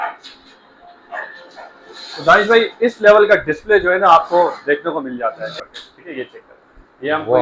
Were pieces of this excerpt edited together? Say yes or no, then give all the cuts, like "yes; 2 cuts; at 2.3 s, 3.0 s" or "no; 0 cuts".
yes; 1 cut; at 5.6 s